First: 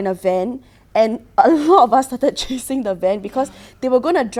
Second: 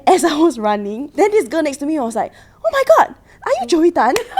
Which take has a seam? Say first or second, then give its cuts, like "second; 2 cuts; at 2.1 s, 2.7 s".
second; 1 cut; at 1.0 s